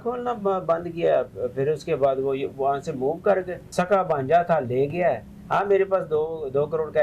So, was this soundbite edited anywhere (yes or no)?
yes